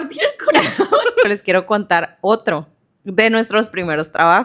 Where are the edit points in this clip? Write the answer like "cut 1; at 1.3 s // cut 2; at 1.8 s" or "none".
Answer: cut 1; at 1.3 s

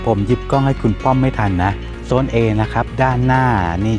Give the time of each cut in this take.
cut 1; at 1.9 s

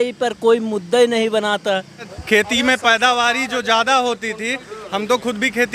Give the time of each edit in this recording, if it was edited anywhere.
cut 1; at 2.1 s

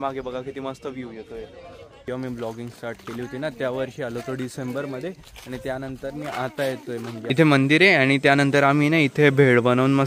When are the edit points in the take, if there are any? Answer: cut 1; at 2.0 s // cut 2; at 7.1 s

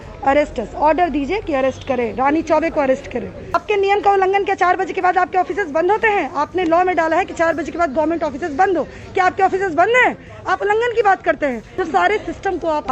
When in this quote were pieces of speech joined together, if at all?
cut 1; at 3.6 s // cut 2; at 11.7 s

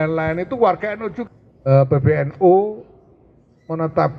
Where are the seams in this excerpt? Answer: cut 1; at 1.1 s

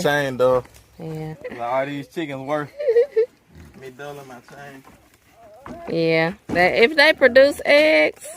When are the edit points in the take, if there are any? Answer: cut 1; at 1.3 s

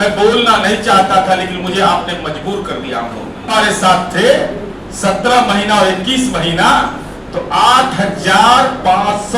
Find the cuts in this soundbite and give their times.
cut 1; at 3.4 s

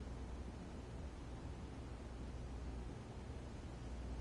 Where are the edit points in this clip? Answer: cut 1; at 2.0 s // cut 2; at 3.0 s

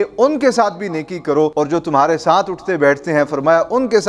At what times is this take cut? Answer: cut 1; at 1.5 s

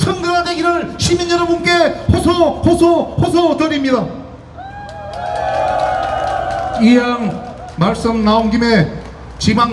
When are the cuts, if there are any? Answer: none

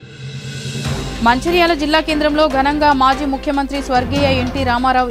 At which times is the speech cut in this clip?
cut 1; at 1.2 s

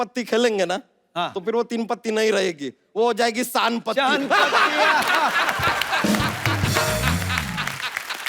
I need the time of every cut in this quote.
none

